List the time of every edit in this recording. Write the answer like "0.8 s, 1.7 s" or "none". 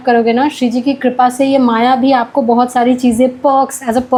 none